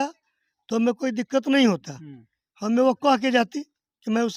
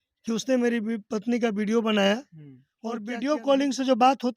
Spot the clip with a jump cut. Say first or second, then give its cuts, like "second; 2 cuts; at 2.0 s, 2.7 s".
second; 1 cut; at 2.1 s